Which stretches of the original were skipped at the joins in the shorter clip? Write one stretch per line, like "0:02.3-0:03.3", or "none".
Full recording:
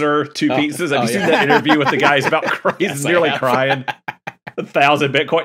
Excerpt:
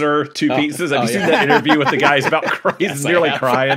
none